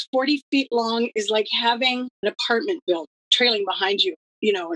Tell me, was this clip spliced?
yes; 2 cuts; at 2.1 s, 3.2 s

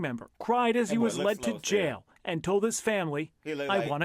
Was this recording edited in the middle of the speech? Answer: no; 0 cuts

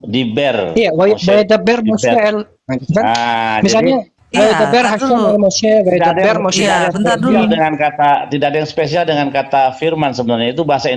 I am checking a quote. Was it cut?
no; 0 cuts

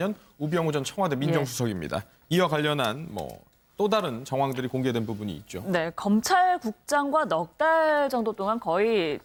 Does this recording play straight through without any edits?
yes; 0 cuts

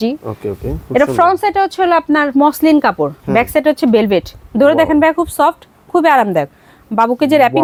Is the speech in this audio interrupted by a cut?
no; 0 cuts

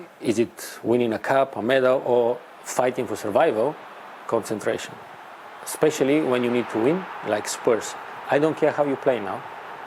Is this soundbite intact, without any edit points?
yes; 0 cuts

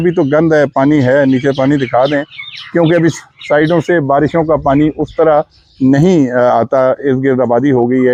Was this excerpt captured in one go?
yes; 0 cuts

